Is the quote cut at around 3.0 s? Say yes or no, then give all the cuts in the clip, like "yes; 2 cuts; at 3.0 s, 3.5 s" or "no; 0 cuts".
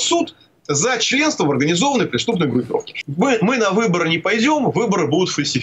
yes; 1 cut; at 3.0 s